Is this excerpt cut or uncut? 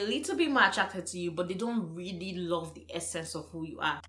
uncut